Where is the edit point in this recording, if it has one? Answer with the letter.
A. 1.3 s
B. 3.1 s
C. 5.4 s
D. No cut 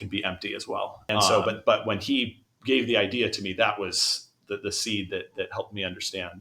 A